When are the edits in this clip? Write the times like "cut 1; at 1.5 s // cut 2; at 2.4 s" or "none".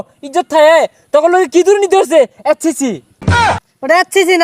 cut 1; at 3.5 s